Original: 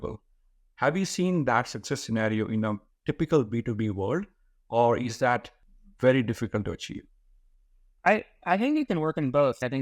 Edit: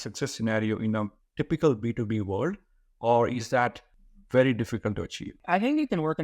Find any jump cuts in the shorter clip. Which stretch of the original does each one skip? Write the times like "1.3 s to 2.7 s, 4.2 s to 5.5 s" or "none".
7.0 s to 8.3 s